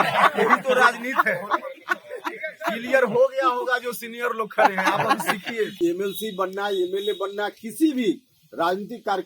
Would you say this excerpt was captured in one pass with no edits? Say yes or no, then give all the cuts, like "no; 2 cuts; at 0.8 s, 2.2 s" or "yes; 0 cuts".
no; 1 cut; at 5.8 s